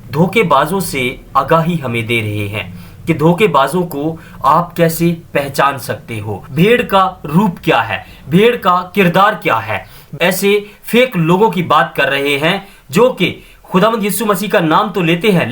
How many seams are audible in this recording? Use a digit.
2